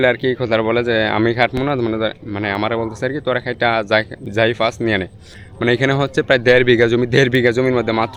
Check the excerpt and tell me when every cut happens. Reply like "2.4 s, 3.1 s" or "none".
none